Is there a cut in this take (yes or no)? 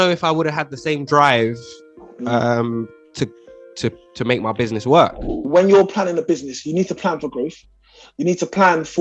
yes